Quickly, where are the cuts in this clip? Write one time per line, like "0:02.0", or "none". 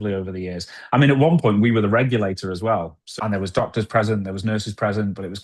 0:03.0